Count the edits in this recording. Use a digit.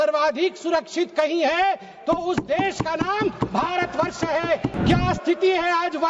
1